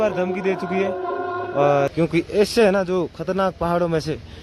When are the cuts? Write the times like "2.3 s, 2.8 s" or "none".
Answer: 1.9 s